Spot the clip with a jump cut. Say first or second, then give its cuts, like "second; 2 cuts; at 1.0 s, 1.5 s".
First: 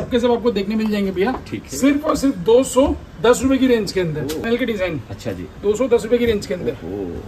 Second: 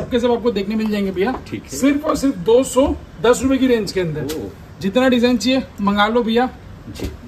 first; 1 cut; at 4.4 s